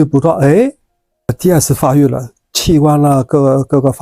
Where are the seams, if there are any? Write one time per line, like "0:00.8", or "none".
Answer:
0:01.3